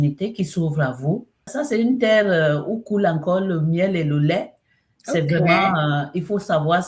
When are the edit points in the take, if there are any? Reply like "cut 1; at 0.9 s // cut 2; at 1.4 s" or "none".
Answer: cut 1; at 1.5 s